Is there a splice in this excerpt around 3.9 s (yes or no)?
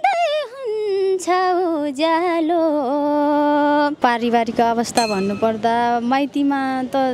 yes